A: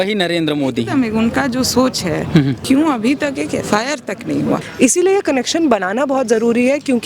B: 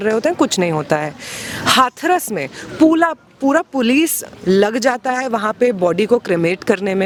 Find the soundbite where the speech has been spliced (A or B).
A